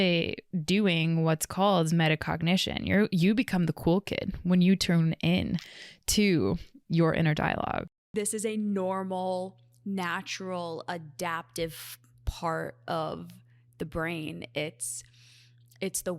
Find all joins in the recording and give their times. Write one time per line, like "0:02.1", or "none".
0:07.8